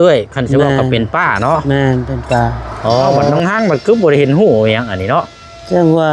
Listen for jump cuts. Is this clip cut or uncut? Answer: cut